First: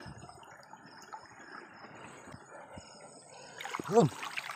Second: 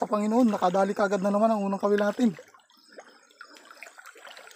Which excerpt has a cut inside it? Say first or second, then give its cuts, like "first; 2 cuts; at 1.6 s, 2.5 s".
first; 1 cut; at 2.3 s